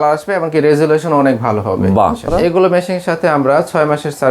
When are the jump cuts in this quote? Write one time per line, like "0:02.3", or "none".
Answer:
0:02.2

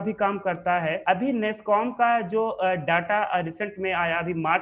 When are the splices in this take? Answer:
0:01.0

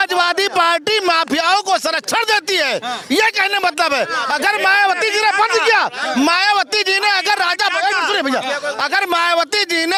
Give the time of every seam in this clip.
none

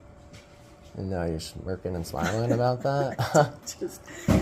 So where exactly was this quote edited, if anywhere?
none

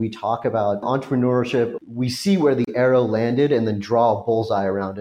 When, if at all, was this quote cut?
0:00.8
0:01.8

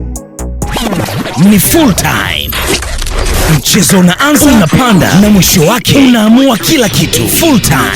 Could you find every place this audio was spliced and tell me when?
0:01.0

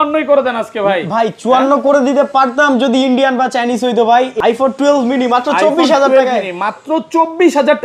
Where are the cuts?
0:04.3

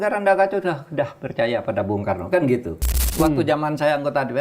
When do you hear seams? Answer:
0:03.0

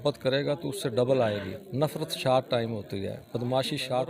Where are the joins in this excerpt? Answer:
0:01.6

